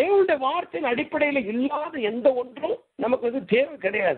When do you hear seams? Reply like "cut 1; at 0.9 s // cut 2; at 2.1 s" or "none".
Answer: cut 1; at 2.9 s